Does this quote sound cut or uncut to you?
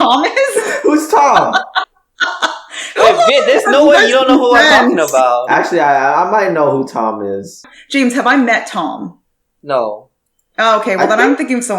cut